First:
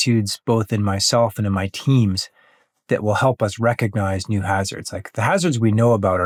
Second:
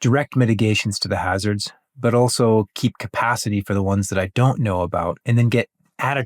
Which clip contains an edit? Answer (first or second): second